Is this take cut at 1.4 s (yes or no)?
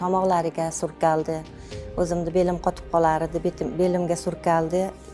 no